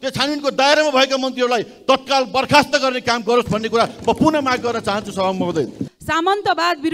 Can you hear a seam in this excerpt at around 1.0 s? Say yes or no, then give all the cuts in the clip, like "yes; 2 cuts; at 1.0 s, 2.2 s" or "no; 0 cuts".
no; 1 cut; at 6.0 s